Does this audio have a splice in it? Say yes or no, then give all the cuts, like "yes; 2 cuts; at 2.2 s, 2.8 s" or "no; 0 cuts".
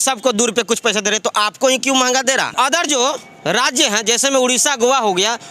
yes; 1 cut; at 2.5 s